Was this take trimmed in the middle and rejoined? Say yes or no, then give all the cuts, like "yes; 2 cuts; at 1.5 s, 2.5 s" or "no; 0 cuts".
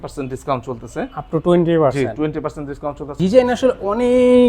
yes; 1 cut; at 3.0 s